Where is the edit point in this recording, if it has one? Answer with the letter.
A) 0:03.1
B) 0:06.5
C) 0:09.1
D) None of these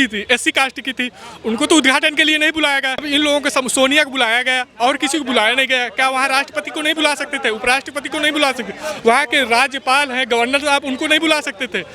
A